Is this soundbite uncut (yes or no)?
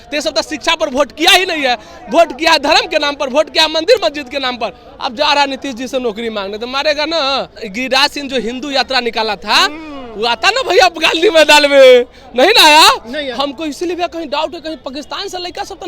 no